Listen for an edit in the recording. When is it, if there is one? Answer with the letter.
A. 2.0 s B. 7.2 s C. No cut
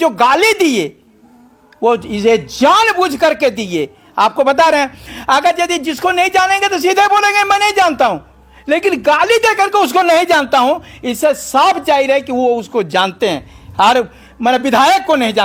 C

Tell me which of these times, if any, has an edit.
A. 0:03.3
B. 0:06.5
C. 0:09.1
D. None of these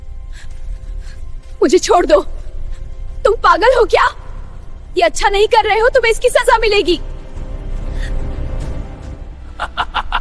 C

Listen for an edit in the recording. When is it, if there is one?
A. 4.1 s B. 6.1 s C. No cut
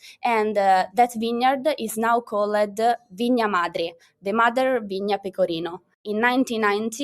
B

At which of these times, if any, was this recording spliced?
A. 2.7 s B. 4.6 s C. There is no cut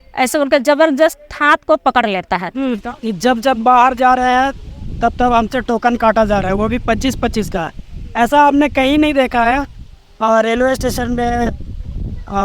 A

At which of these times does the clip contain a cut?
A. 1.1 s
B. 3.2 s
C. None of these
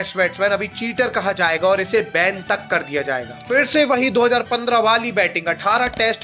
B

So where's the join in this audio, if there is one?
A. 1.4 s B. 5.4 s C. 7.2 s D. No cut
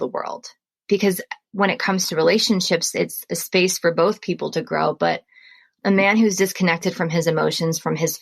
A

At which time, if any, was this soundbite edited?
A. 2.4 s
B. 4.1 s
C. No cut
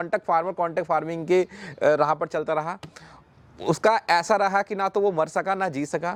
C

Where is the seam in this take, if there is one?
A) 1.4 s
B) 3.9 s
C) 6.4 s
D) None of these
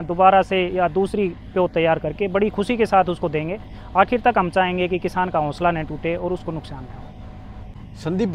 D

